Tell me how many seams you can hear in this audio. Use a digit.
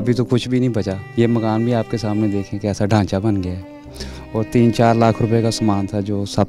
1